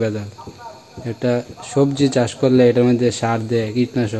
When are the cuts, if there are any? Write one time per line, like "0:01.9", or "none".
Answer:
none